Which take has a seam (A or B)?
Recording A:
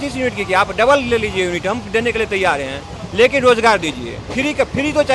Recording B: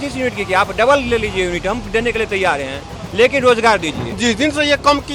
B